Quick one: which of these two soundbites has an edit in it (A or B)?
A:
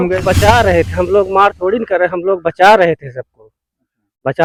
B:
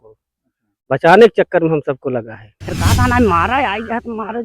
B